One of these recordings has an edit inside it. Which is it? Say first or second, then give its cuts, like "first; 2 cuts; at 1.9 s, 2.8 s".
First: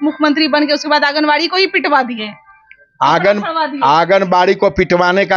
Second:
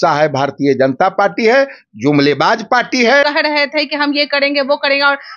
second; 1 cut; at 3.2 s